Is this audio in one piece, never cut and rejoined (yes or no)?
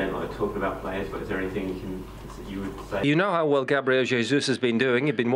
no